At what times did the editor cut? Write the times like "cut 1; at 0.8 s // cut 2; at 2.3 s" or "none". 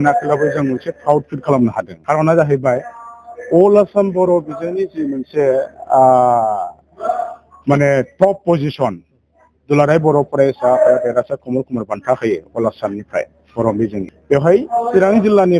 cut 1; at 1.9 s // cut 2; at 14.1 s